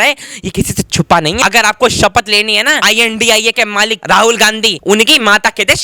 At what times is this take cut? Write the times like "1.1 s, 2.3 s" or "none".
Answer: 1.4 s, 2.8 s, 4.0 s, 4.7 s